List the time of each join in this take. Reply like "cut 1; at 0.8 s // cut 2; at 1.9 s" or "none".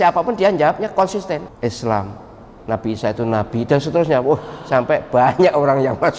cut 1; at 1.5 s